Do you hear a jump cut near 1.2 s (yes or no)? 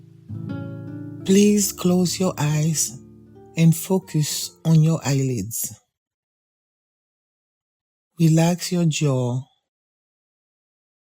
yes